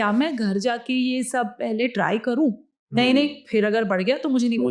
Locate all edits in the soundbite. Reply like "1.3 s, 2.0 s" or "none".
none

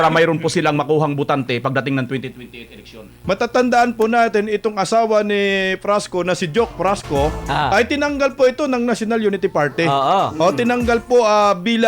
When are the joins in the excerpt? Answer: 3.2 s

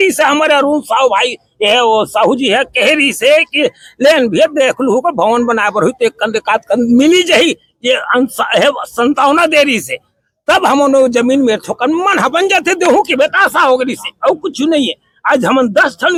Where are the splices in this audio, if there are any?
none

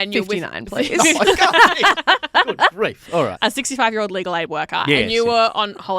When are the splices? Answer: 3.3 s

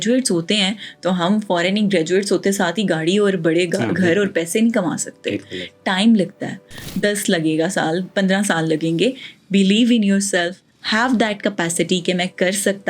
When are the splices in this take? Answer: none

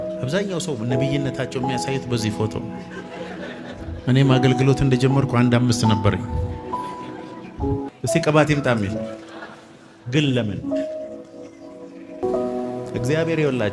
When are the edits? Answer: 7.9 s, 12.2 s

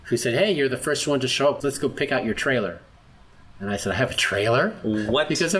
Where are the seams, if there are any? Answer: none

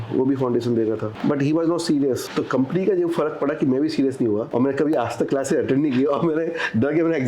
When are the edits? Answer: 1.1 s, 2.3 s, 4.5 s

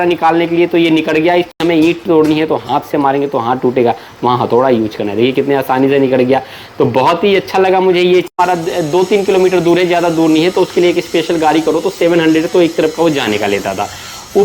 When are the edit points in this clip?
1.6 s, 8.3 s

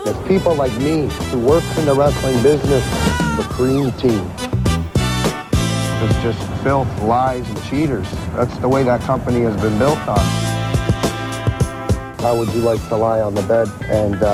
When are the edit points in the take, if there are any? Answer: none

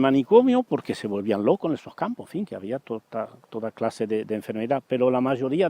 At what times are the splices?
1.5 s

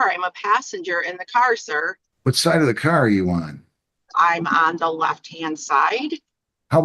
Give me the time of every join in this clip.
2.0 s

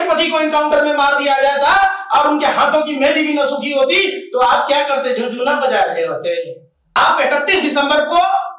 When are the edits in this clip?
6.8 s

